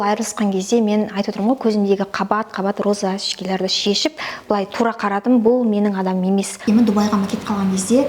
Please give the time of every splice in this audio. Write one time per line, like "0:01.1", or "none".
0:06.6